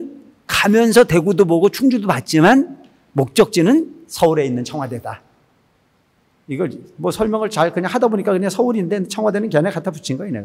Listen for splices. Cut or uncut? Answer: uncut